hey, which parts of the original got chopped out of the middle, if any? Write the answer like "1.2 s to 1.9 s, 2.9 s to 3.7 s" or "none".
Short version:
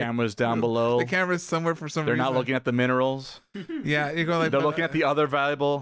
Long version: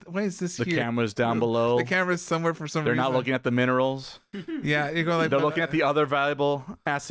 none